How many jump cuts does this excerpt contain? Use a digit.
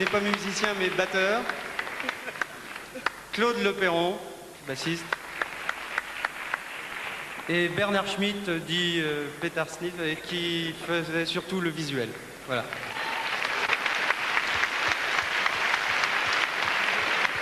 0